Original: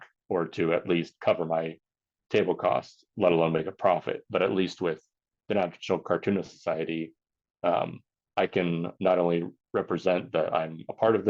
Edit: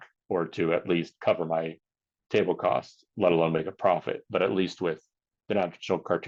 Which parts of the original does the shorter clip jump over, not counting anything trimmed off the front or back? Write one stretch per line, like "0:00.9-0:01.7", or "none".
none